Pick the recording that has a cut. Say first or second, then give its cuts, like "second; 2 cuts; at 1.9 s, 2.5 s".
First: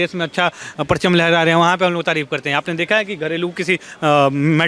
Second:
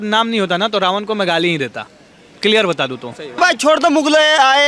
second; 1 cut; at 3.4 s